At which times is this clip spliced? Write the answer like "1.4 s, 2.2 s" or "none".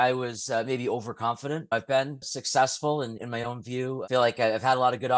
1.7 s, 3.2 s